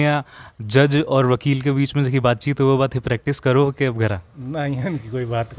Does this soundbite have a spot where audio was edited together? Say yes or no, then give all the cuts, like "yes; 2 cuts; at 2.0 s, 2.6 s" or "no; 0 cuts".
no; 0 cuts